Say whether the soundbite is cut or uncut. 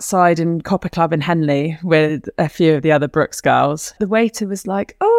cut